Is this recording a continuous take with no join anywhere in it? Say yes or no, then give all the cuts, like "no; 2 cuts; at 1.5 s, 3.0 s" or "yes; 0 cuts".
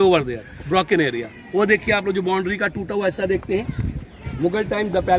yes; 0 cuts